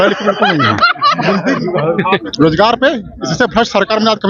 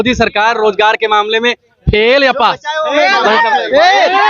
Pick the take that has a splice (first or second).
first